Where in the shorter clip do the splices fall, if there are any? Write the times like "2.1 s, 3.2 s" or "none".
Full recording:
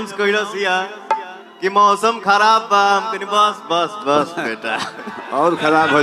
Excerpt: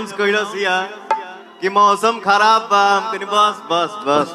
none